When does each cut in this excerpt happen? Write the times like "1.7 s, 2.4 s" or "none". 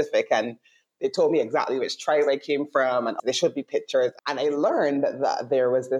3.2 s, 4.2 s